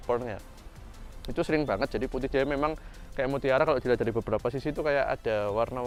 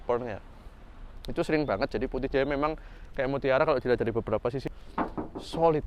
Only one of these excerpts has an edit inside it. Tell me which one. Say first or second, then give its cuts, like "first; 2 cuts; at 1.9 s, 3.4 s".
second; 1 cut; at 4.6 s